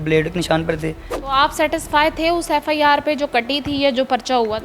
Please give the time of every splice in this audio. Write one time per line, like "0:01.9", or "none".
0:01.1